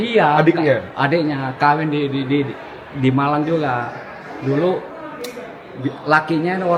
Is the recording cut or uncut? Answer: uncut